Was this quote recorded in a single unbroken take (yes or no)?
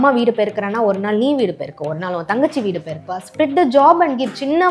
yes